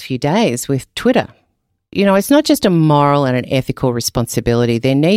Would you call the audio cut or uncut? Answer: cut